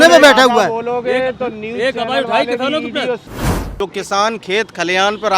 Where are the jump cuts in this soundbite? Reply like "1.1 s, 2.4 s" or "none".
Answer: 3.5 s